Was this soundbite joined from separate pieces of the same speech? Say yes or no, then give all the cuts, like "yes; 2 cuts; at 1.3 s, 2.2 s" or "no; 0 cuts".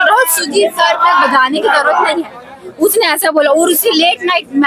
no; 0 cuts